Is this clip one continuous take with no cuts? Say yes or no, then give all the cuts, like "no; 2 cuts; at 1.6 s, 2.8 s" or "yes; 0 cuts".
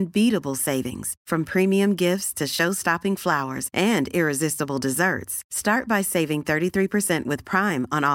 yes; 0 cuts